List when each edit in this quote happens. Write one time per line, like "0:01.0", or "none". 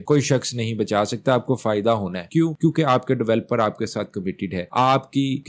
none